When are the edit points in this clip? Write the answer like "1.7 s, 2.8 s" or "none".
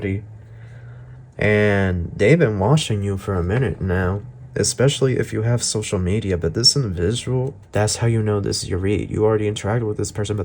7.6 s